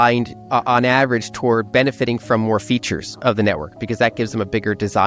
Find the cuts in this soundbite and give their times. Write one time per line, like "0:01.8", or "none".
none